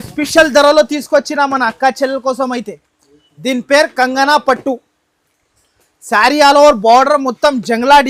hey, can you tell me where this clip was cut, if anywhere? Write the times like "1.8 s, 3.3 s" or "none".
none